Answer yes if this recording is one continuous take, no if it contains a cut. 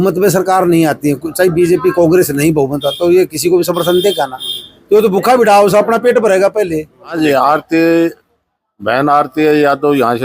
no